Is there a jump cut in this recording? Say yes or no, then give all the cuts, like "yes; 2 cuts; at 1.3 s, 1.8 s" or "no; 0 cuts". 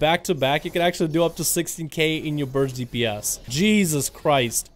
yes; 1 cut; at 3.4 s